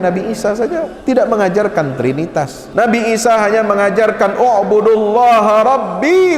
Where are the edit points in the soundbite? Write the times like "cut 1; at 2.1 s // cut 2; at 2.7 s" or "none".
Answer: cut 1; at 0.9 s // cut 2; at 2.6 s